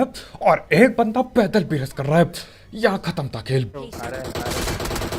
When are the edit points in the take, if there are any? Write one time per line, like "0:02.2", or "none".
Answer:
0:03.8